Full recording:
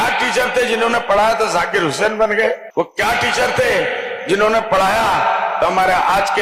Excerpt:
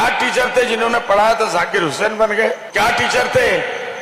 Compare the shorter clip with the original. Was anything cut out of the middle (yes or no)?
yes